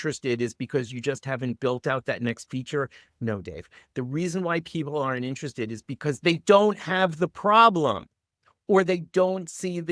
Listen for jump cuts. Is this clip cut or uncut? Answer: uncut